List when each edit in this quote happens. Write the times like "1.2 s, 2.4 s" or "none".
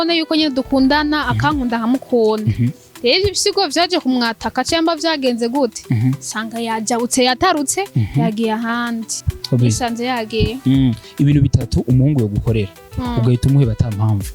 9.1 s